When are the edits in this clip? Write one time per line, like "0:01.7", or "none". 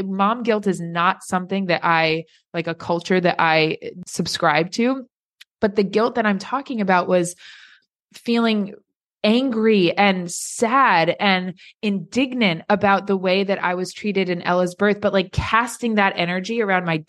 none